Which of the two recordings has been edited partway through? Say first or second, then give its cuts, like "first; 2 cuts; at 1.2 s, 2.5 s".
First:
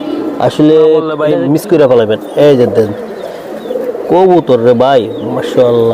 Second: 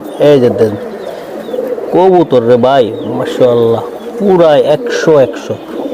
first; 1 cut; at 1.2 s